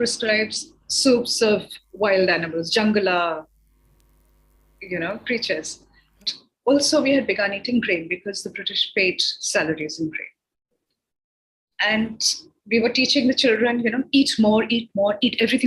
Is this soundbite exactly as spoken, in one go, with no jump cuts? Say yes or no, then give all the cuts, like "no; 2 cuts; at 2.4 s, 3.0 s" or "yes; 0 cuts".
no; 1 cut; at 6.4 s